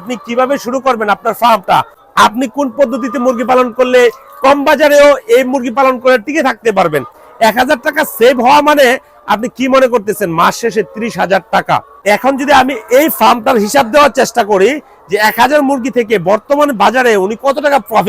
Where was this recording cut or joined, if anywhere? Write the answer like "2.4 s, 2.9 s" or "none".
2.0 s, 7.2 s, 11.9 s